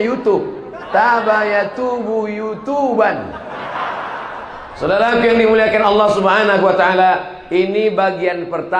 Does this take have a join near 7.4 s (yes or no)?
no